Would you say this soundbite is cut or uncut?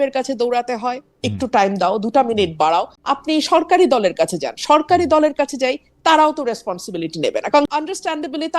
cut